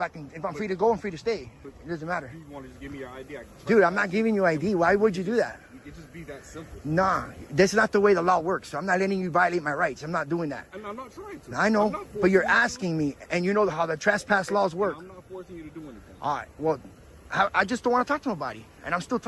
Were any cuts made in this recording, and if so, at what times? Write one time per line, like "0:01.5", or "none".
none